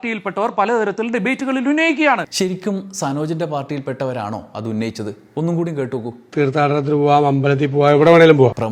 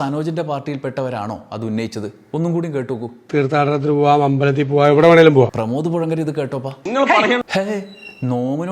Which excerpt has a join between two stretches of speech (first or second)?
second